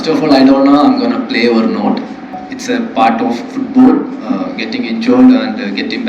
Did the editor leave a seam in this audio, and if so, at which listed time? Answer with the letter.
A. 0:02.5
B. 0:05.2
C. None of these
A